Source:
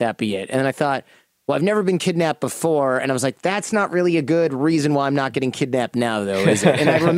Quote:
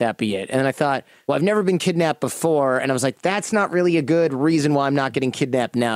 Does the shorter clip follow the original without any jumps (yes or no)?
no